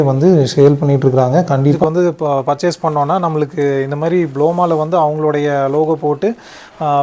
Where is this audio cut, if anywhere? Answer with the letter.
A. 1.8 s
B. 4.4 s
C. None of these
A